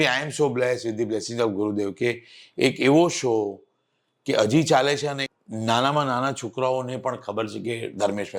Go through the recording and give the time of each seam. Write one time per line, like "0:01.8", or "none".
0:05.3